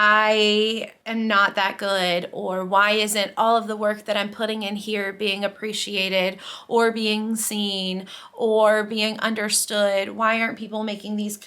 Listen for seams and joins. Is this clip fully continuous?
no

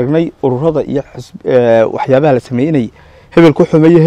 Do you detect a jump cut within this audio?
no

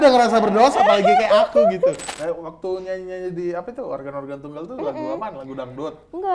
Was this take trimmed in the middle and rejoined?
yes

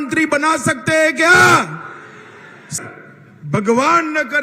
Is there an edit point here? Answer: yes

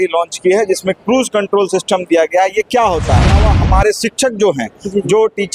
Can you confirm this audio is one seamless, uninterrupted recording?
no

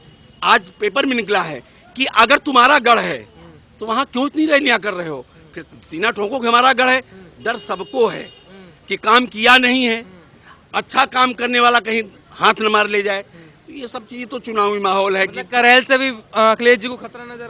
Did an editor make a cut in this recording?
no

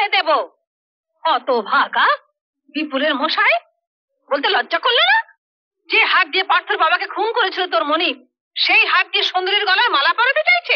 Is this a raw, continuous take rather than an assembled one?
yes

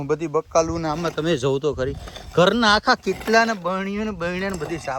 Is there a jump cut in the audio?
no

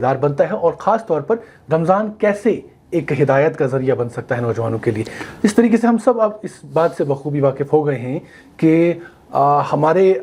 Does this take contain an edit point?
no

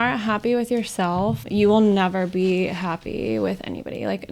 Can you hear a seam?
yes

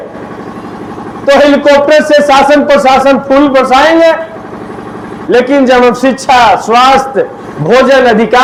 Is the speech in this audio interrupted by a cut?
no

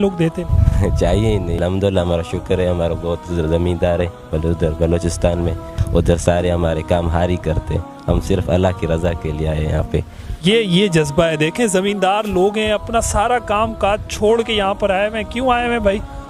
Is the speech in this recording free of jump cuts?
no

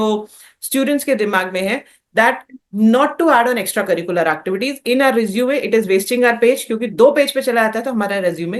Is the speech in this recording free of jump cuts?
yes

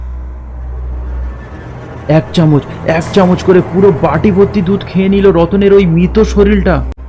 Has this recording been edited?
no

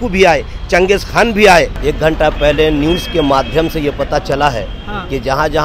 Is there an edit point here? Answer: yes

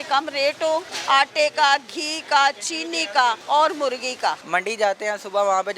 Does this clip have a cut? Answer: yes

